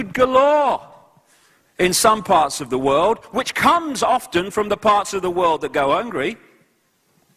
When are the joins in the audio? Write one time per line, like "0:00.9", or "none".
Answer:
none